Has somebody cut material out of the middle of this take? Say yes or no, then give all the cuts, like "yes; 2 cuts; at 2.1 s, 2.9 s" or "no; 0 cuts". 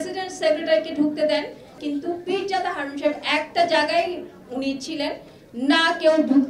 yes; 1 cut; at 1.8 s